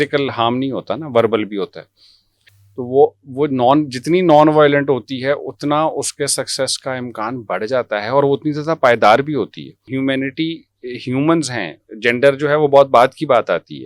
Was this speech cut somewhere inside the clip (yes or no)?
yes